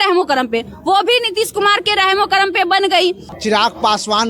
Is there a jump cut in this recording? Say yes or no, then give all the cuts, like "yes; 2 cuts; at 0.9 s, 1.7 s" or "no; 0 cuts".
yes; 1 cut; at 3.3 s